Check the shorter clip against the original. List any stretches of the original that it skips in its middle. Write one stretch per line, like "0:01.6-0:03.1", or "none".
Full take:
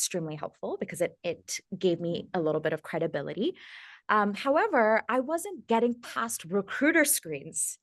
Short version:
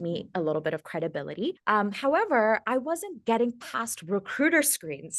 0:03.6-0:04.0